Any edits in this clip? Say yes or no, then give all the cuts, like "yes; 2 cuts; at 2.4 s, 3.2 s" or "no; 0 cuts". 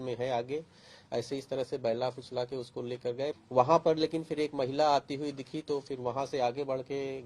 yes; 1 cut; at 3.4 s